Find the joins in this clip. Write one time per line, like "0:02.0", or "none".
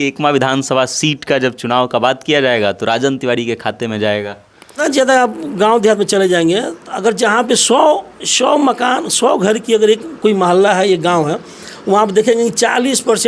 0:04.8